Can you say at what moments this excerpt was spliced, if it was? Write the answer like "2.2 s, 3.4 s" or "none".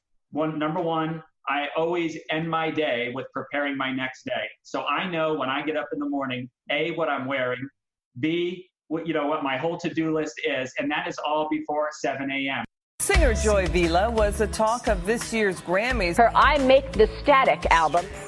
12.7 s